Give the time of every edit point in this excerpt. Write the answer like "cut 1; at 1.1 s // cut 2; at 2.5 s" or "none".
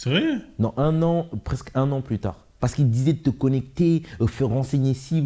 cut 1; at 2.5 s